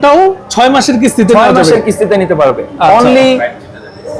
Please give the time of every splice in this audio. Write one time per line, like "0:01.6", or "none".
none